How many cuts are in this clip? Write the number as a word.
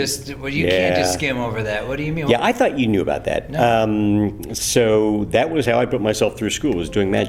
zero